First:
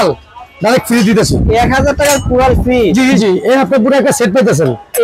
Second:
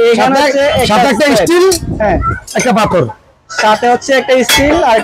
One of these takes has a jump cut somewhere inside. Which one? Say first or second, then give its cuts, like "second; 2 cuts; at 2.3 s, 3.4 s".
first; 1 cut; at 3.2 s